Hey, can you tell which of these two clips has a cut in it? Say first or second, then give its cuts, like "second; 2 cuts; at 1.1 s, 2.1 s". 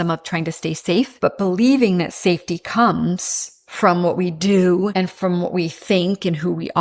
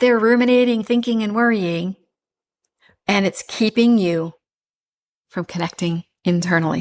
first; 2 cuts; at 1.1 s, 4.9 s